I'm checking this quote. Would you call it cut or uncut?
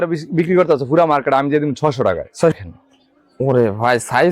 cut